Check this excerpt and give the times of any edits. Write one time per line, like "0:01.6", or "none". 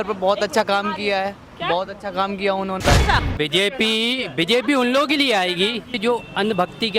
0:03.0
0:05.9